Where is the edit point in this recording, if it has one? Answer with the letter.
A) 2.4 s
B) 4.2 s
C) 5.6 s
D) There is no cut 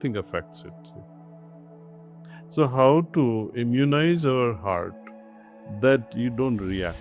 D